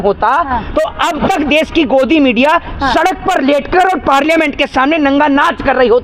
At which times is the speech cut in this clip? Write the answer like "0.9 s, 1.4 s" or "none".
none